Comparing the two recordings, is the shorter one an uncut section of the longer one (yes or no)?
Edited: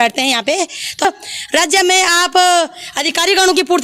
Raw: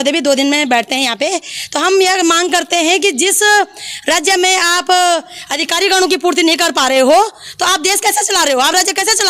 no